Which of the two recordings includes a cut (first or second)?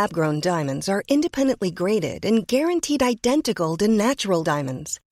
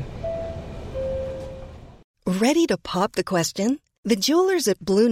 second